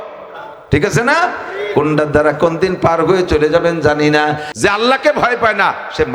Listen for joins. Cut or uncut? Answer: cut